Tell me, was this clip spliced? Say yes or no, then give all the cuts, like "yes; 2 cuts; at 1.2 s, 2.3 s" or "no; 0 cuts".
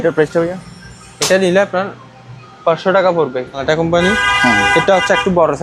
yes; 1 cut; at 3.6 s